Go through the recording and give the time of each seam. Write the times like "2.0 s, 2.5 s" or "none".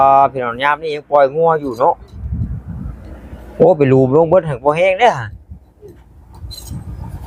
none